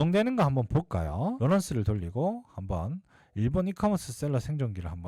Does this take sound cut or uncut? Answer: uncut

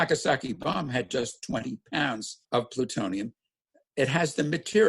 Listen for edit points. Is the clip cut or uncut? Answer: cut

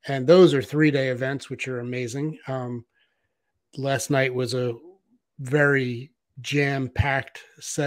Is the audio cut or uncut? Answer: uncut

